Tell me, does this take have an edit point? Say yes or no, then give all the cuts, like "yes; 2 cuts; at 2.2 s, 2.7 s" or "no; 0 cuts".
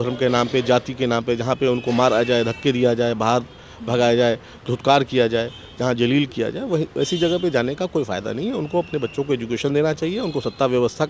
no; 0 cuts